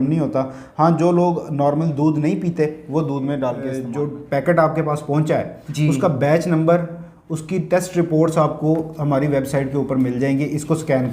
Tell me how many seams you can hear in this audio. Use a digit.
1